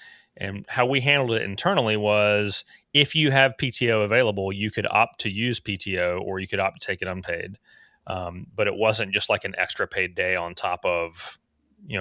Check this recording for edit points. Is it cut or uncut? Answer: uncut